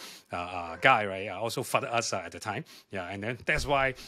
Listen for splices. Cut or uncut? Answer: uncut